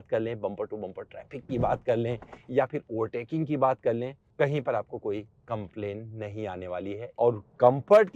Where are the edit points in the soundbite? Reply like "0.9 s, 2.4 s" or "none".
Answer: 4.2 s, 7.0 s